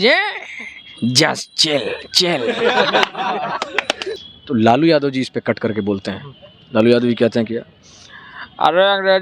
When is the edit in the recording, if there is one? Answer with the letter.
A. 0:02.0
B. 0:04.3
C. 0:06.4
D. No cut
B